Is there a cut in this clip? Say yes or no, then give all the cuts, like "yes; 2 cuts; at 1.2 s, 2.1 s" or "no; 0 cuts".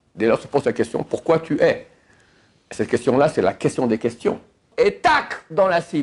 yes; 1 cut; at 4.7 s